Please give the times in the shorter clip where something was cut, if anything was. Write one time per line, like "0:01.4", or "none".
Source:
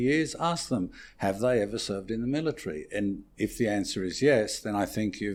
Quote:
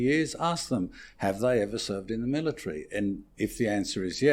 none